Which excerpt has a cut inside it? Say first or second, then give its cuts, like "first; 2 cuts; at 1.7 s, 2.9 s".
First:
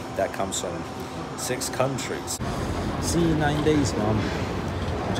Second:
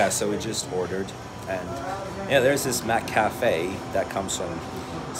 first; 1 cut; at 2.4 s